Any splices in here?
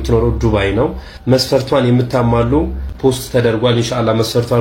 no; 0 cuts

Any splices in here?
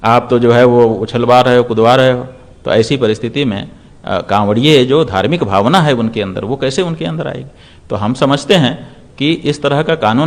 no; 0 cuts

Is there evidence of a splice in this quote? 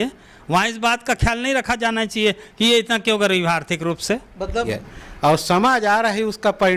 yes; 1 cut; at 4.7 s

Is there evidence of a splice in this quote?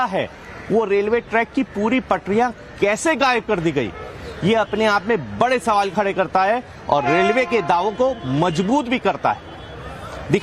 yes; 1 cut; at 1.1 s

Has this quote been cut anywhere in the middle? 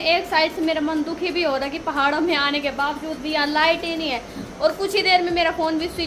no; 0 cuts

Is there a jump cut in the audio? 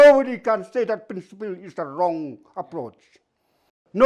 no; 0 cuts

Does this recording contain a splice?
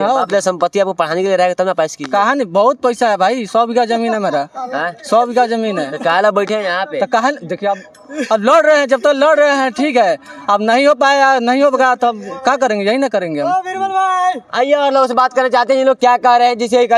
no; 0 cuts

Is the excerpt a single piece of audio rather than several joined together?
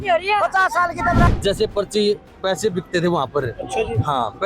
no; 1 cut; at 1.3 s

